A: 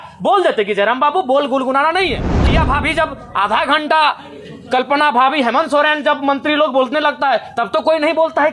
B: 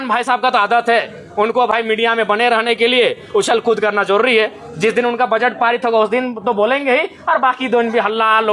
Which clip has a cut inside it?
A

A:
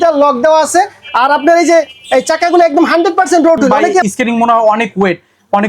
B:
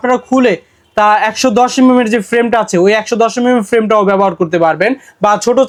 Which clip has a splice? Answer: A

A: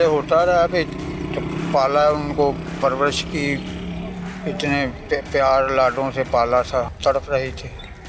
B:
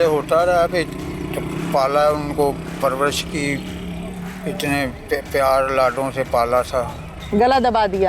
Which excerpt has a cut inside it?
A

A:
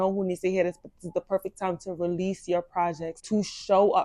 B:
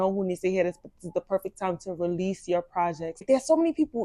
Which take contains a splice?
B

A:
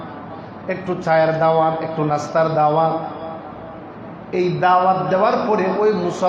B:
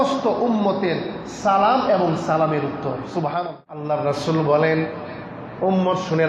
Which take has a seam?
B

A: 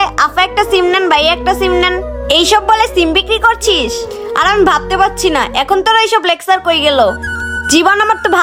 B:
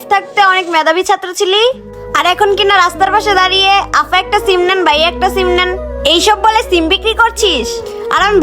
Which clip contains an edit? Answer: B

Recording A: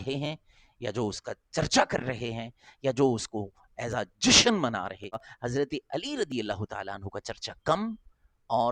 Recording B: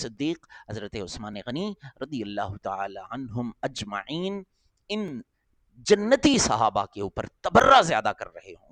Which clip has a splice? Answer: A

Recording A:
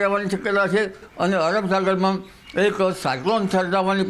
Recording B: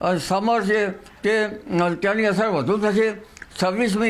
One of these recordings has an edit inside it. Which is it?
A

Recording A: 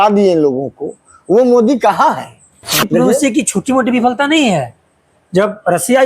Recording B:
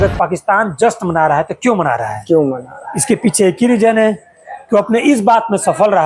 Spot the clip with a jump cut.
A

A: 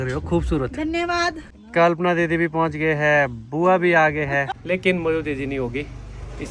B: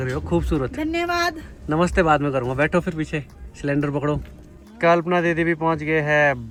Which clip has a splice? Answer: A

